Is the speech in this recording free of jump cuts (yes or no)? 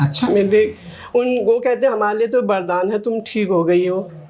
yes